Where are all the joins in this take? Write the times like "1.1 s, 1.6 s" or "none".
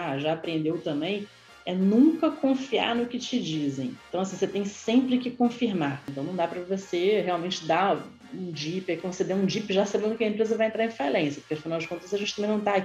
6.1 s